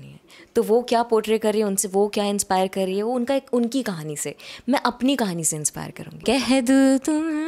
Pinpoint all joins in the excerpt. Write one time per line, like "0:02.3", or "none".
0:06.2